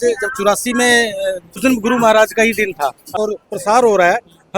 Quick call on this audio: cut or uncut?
cut